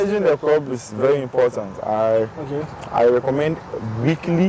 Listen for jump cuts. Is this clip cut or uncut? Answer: uncut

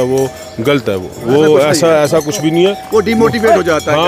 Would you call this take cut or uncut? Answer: uncut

